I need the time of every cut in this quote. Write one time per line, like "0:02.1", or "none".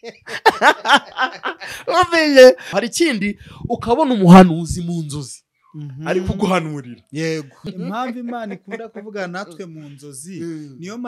0:02.7
0:07.6